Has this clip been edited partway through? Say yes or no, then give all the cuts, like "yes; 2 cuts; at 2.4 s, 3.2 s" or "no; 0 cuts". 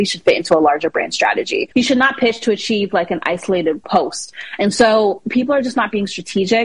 yes; 2 cuts; at 1.7 s, 3.8 s